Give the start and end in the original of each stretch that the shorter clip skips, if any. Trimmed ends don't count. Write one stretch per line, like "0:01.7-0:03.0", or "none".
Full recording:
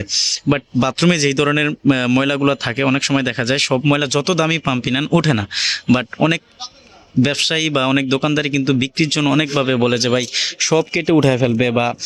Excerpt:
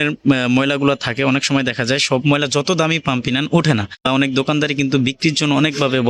0:05.7-0:07.8